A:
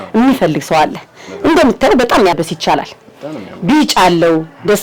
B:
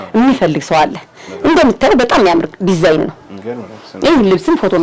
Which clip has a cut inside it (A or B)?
A